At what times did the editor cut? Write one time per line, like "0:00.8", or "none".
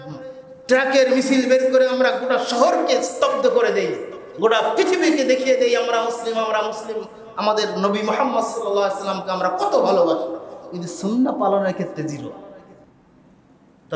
none